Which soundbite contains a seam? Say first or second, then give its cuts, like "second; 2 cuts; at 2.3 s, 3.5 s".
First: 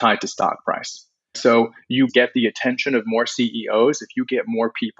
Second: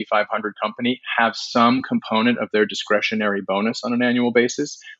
first; 2 cuts; at 1.3 s, 2.1 s